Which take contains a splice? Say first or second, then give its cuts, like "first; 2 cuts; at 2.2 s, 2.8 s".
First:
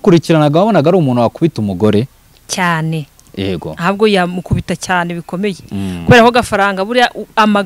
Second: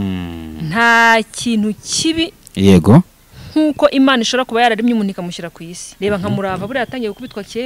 second; 1 cut; at 5.9 s